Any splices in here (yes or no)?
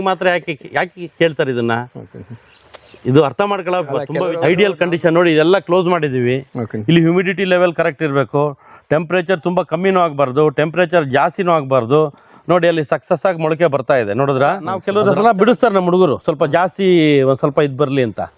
yes